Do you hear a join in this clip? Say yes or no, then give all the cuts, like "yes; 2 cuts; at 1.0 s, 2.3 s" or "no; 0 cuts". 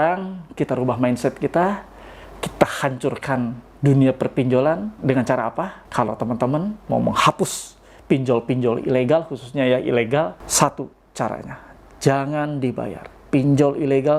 yes; 3 cuts; at 4.9 s, 5.8 s, 10.4 s